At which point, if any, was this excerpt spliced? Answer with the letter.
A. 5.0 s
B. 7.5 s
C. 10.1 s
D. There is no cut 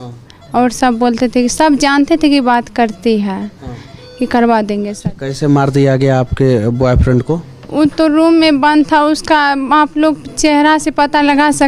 A